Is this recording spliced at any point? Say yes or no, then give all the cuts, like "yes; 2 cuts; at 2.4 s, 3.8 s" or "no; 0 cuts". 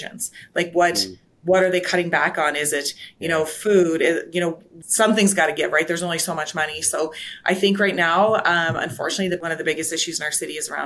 yes; 2 cuts; at 4.8 s, 9.4 s